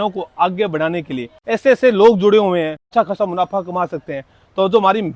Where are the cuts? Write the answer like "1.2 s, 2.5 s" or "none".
1.3 s, 2.8 s